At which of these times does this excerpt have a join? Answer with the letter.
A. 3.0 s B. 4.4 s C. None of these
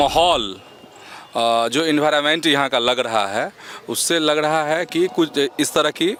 C